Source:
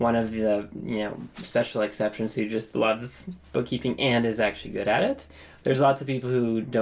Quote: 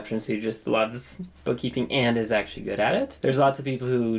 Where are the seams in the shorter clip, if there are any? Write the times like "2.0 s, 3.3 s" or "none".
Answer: 3.1 s